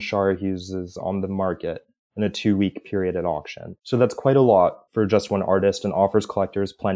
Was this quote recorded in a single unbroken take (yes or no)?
no